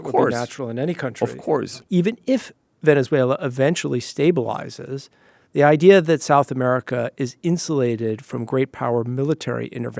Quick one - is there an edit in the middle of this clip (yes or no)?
yes